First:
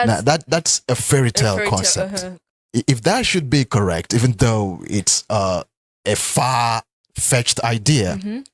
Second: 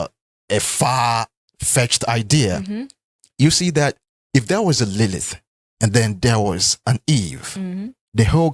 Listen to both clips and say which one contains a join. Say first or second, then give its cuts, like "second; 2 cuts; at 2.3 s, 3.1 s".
first; 1 cut; at 2.0 s